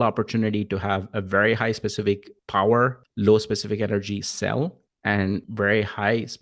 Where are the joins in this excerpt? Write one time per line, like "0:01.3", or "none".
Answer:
0:02.3
0:03.0
0:05.3